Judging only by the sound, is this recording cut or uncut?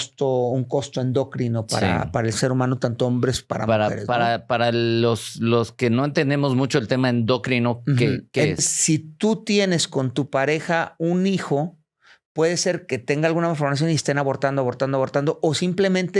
cut